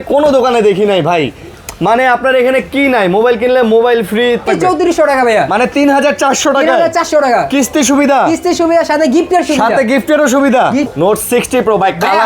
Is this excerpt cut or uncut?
cut